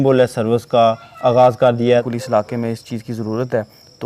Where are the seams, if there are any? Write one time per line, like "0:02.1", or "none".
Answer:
0:02.1